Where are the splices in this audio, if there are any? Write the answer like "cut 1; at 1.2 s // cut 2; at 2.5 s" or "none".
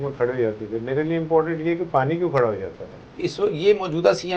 cut 1; at 3.0 s